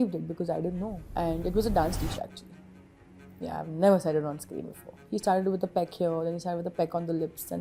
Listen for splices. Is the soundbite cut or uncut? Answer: cut